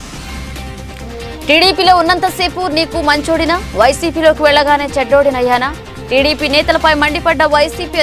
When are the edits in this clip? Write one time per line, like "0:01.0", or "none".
none